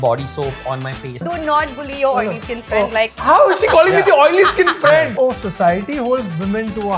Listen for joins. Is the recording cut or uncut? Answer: cut